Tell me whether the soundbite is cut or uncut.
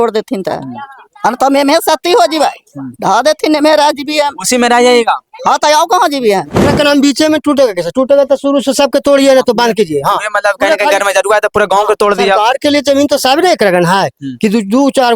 cut